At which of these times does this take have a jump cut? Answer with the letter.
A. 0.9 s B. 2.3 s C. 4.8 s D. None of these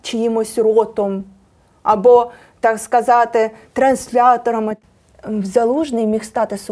C